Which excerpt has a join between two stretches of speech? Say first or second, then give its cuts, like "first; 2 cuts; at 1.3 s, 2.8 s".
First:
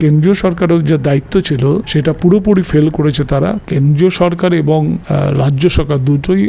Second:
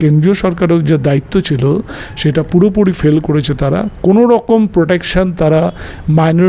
first; 3 cuts; at 1.9 s, 3.6 s, 5.0 s